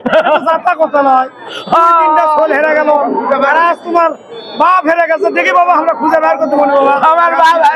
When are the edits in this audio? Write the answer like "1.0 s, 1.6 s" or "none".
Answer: none